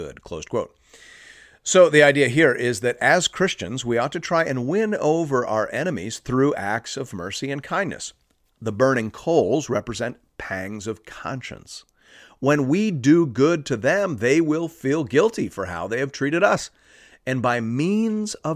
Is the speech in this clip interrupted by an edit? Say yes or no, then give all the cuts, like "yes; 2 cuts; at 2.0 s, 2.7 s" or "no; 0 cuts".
no; 0 cuts